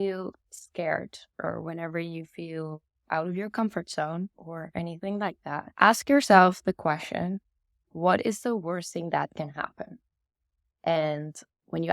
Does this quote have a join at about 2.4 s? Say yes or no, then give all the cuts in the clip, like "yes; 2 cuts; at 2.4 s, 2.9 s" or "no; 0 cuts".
no; 2 cuts; at 4.4 s, 5.7 s